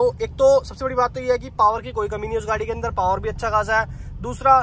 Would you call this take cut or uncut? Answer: uncut